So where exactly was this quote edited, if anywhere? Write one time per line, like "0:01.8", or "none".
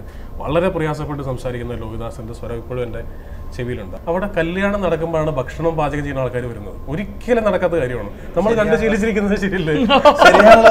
0:03.9